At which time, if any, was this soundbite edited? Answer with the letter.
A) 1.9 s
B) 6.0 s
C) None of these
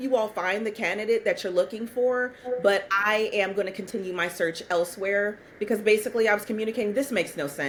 C